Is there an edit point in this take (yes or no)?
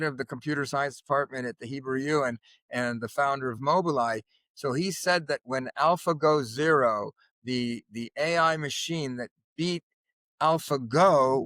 no